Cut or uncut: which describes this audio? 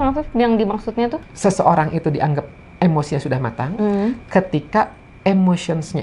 cut